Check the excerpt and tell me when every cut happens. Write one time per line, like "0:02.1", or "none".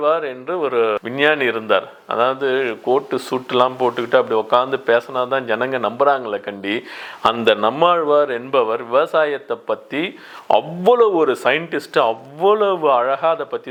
none